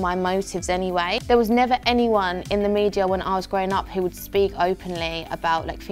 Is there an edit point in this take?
yes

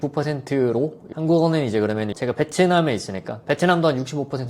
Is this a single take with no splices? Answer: no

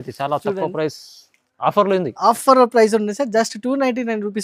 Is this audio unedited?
yes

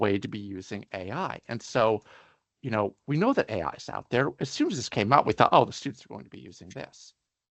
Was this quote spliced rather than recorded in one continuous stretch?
no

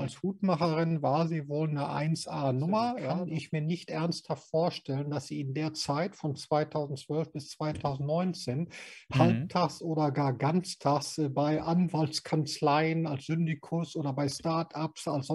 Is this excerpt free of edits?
no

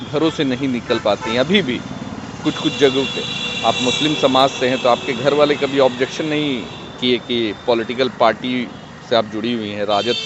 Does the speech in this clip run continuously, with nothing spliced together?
yes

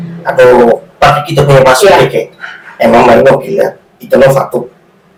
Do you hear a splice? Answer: no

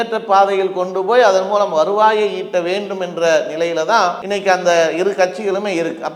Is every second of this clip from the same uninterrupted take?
yes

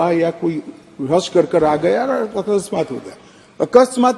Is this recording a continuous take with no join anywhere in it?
yes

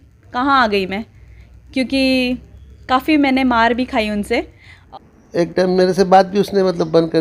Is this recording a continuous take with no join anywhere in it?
no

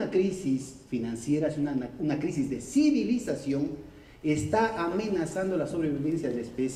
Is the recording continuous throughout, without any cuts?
yes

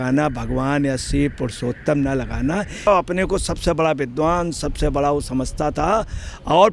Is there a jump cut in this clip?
yes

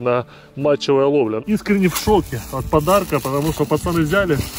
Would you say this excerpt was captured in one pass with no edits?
no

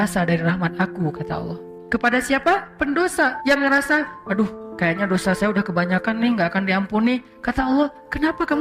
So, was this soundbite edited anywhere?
yes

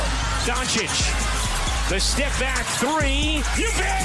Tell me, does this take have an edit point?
no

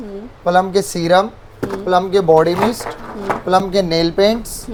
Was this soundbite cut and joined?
no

